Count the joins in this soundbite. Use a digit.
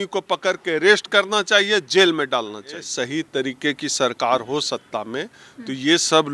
1